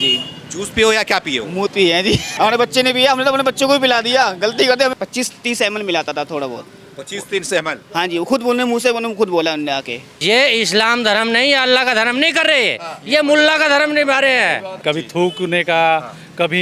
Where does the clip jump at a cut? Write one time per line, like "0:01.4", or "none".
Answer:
0:02.3
0:04.9
0:10.0
0:14.8